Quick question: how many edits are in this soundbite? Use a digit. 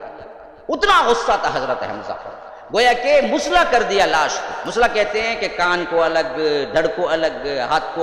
0